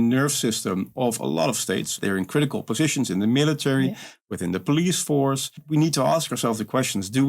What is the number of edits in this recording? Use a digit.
2